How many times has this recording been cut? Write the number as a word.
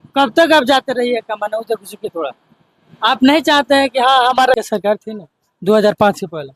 one